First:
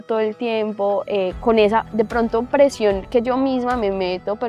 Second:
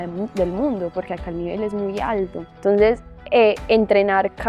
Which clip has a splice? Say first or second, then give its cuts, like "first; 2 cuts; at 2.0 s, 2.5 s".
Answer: second; 1 cut; at 2.4 s